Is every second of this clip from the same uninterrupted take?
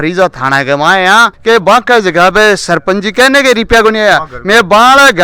no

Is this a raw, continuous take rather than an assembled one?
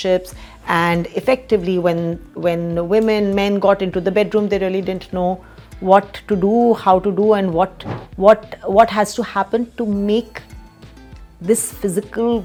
yes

